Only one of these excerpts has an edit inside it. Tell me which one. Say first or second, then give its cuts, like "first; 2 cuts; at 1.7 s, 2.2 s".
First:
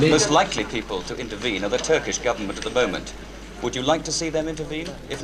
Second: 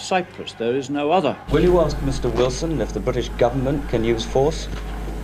second; 1 cut; at 1.4 s